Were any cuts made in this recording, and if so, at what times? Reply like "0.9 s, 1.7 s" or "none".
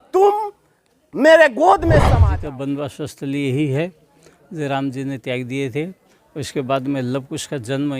2.1 s

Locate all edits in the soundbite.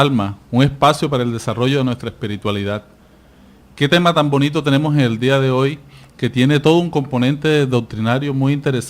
1.2 s

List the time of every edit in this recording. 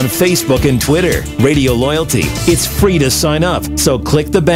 none

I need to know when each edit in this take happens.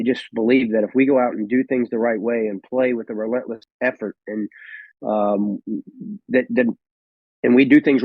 3.6 s

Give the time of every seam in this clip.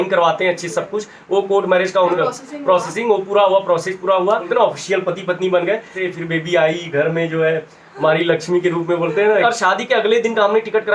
2.2 s, 4.5 s, 6.0 s, 9.4 s

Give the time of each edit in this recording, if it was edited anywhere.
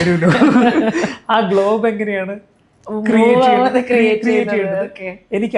none

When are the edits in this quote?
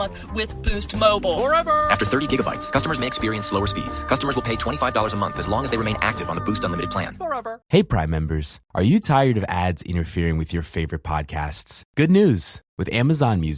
7.6 s

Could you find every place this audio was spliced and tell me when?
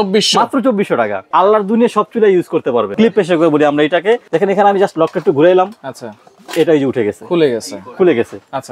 1.2 s, 2.9 s, 4.2 s

